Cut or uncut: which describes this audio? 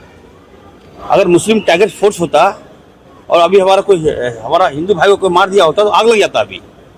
uncut